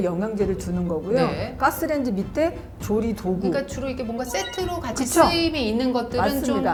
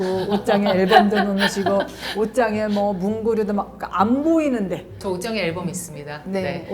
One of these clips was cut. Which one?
second; 1 cut; at 5.0 s

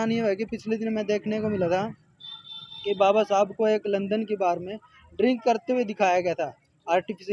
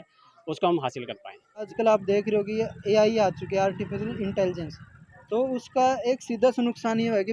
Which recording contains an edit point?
second; 1 cut; at 1.7 s

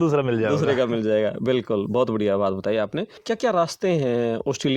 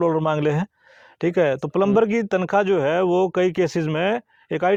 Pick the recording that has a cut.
first; 1 cut; at 3.1 s

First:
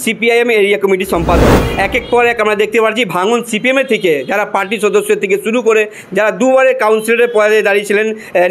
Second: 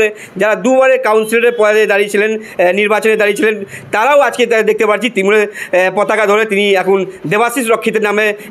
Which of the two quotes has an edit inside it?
first; 1 cut; at 1.6 s

